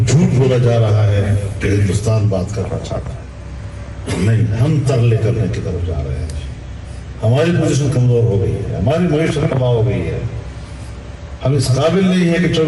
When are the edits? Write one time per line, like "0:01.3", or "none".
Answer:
none